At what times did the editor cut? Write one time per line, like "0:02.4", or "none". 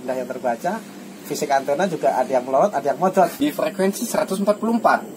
0:03.3